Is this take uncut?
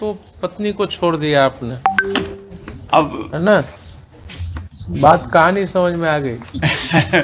yes; 0 cuts

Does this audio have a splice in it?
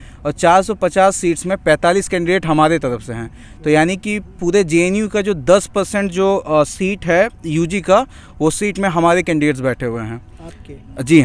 no; 0 cuts

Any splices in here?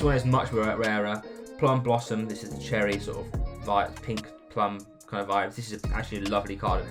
no; 0 cuts

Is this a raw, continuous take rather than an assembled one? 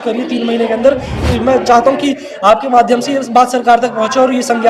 no; 1 cut; at 1.1 s

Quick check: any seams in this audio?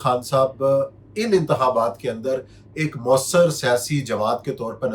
no; 0 cuts

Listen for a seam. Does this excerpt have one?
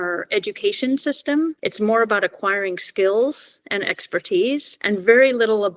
yes; 2 cuts; at 1.6 s, 4.7 s

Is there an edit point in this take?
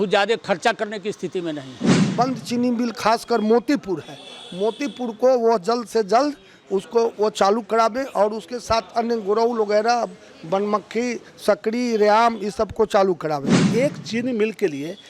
yes; 2 cuts; at 2.1 s, 13.6 s

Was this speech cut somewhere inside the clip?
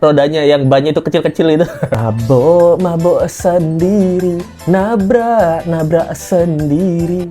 yes; 1 cut; at 1.9 s

